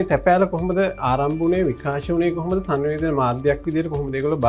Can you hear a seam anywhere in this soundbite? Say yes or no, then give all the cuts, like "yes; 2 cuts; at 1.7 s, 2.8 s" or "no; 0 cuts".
no; 0 cuts